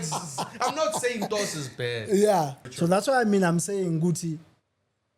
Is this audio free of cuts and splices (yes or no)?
no